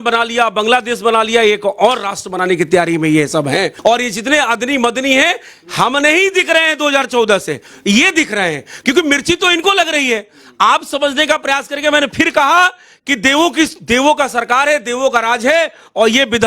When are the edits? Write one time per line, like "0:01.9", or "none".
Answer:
0:03.7